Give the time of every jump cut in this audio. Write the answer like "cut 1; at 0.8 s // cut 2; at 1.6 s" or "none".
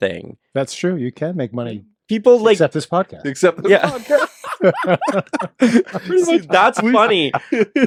none